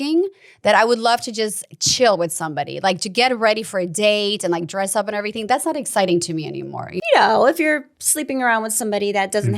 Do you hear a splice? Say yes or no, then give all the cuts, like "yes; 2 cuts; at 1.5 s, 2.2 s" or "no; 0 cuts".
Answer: yes; 1 cut; at 6.9 s